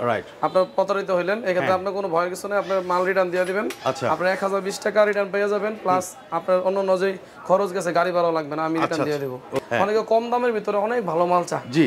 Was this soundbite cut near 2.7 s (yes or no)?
no